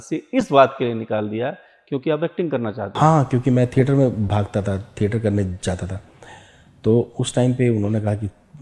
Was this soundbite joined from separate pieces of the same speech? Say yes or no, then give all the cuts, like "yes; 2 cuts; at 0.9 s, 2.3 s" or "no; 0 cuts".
no; 0 cuts